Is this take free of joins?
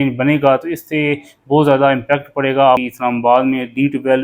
no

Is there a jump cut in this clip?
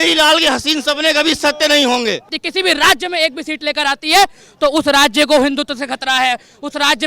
yes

